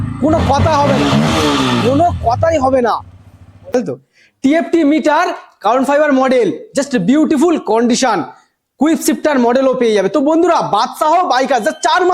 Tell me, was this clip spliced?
yes; 1 cut; at 4.0 s

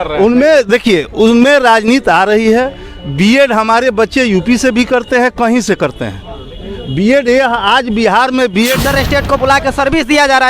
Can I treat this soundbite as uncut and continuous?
no; 1 cut; at 8.8 s

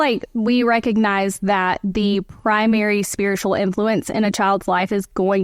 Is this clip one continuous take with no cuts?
yes; 0 cuts

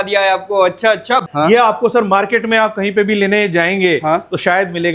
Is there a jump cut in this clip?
yes; 1 cut; at 1.2 s

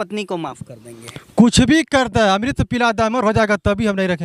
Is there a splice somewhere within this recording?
no; 0 cuts

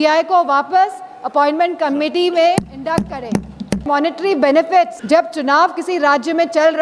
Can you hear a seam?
yes; 2 cuts; at 3.8 s, 5.0 s

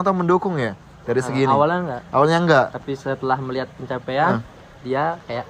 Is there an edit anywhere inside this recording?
yes; 1 cut; at 4.5 s

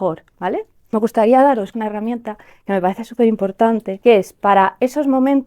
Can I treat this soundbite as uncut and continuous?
no; 3 cuts; at 0.9 s, 1.7 s, 3.9 s

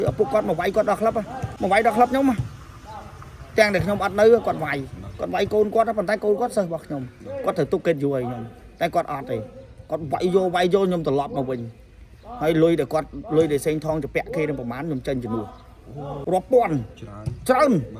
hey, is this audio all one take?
no; 2 cuts; at 1.4 s, 16.2 s

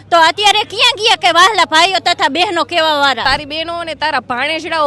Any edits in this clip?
yes; 1 cut; at 3.2 s

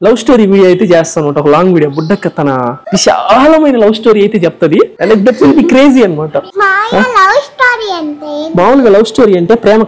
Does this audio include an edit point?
no; 0 cuts

